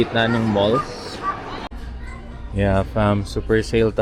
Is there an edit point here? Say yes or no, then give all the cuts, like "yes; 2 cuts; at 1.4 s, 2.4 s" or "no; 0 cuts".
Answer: yes; 1 cut; at 1.7 s